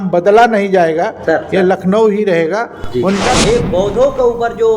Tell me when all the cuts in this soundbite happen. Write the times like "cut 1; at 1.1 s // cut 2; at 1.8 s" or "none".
cut 1; at 3.3 s